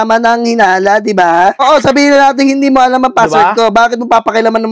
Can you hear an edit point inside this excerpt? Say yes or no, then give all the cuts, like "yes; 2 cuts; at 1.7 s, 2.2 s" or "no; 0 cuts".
yes; 1 cut; at 1.6 s